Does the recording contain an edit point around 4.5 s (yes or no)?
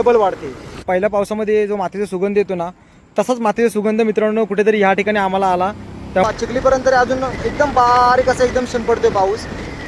no